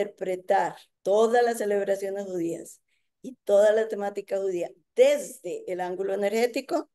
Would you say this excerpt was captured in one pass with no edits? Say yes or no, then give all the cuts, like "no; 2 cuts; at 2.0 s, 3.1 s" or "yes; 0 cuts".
yes; 0 cuts